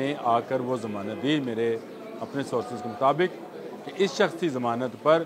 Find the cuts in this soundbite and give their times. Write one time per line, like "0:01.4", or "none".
none